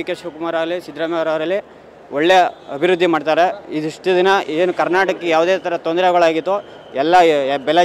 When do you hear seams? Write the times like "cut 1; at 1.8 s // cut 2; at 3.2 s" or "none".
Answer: none